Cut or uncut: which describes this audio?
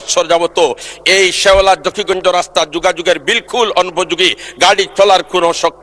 uncut